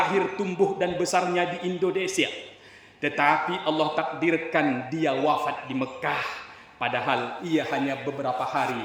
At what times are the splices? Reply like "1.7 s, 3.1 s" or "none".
none